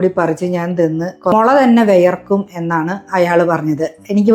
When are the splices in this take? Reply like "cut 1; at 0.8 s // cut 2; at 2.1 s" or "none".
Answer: cut 1; at 1.3 s